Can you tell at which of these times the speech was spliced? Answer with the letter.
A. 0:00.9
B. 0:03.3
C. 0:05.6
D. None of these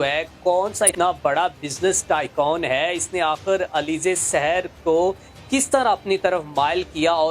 A